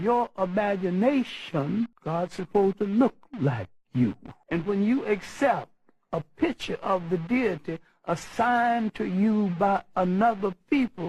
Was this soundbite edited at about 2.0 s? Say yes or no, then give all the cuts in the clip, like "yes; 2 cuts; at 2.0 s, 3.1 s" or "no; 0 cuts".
yes; 2 cuts; at 2.0 s, 4.3 s